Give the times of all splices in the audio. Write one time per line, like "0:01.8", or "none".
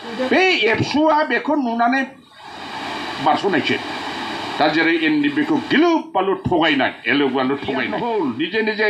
0:07.9

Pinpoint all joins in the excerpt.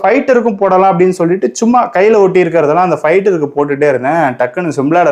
none

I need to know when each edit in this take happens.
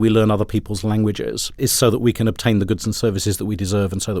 0:01.5

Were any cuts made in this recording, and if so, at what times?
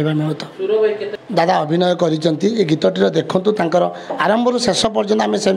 0:01.1

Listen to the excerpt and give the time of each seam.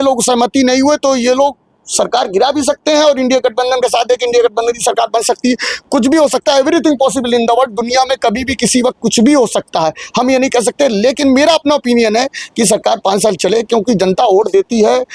none

